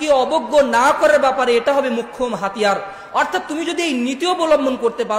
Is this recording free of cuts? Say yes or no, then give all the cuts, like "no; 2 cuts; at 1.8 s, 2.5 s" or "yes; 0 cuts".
yes; 0 cuts